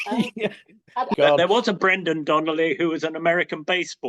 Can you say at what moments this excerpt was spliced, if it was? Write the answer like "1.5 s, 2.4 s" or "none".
1.1 s